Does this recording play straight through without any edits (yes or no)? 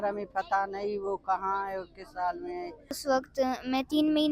no